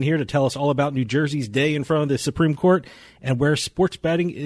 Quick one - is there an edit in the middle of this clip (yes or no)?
no